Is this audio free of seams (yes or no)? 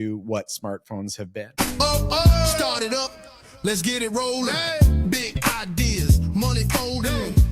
no